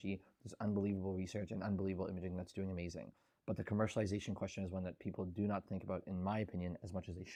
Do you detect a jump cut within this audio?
no; 0 cuts

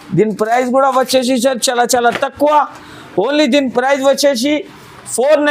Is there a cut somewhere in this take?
no; 0 cuts

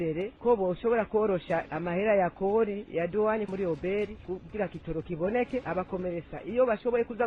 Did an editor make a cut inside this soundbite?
no; 0 cuts

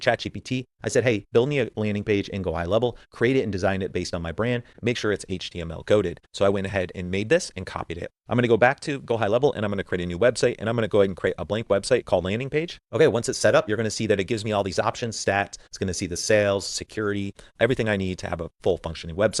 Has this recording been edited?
no; 0 cuts

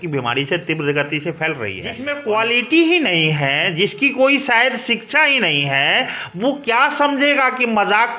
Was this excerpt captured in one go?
no; 1 cut; at 2.1 s

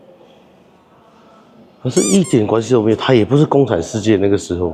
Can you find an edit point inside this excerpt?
no; 0 cuts

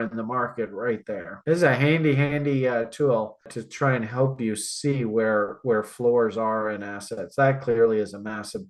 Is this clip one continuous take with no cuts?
yes; 0 cuts

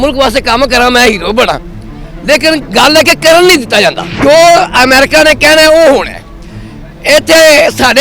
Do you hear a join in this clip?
yes; 1 cut; at 4.1 s

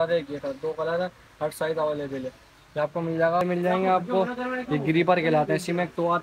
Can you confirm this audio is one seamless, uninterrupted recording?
no; 1 cut; at 3.4 s

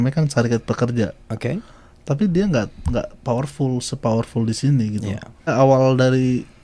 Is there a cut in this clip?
yes; 1 cut; at 5.5 s

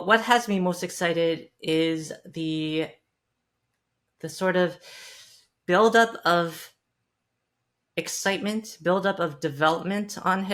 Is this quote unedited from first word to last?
yes; 0 cuts

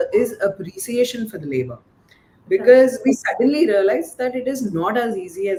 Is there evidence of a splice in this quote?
no; 0 cuts

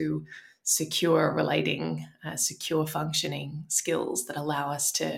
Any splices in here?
no; 0 cuts

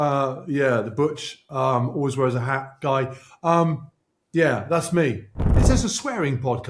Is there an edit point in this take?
yes; 1 cut; at 5.4 s

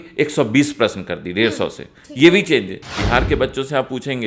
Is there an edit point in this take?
yes; 1 cut; at 2.9 s

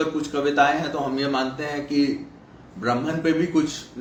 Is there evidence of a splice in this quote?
no; 0 cuts

